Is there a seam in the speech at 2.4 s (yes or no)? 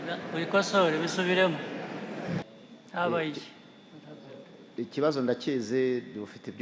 yes